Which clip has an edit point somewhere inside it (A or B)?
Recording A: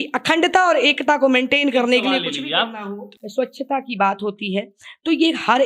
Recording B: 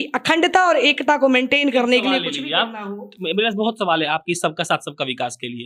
A